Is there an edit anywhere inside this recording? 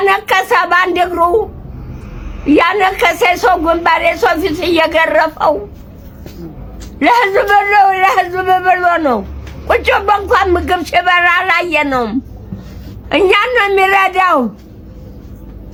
no; 0 cuts

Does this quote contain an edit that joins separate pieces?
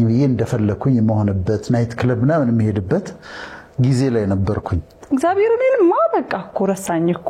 yes; 1 cut; at 4.9 s

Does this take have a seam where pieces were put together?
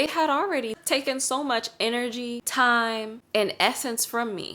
yes; 3 cuts; at 0.8 s, 2.4 s, 3.2 s

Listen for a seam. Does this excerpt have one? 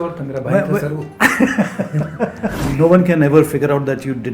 yes; 1 cut; at 2.6 s

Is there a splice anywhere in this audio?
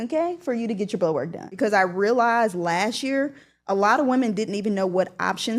yes; 1 cut; at 1.4 s

